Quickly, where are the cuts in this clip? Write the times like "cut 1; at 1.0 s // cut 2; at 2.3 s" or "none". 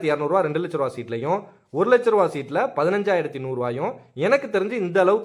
none